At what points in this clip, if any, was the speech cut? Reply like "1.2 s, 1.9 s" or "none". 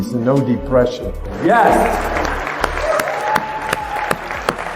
1.4 s